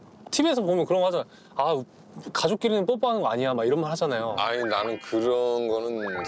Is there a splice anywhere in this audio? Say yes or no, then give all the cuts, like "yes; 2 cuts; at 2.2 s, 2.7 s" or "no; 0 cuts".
no; 0 cuts